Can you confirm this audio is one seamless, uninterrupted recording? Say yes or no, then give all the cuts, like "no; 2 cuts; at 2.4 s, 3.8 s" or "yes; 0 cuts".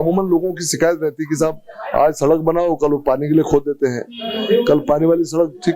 yes; 0 cuts